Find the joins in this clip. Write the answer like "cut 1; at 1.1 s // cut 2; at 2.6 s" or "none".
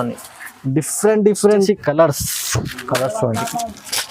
cut 1; at 1.7 s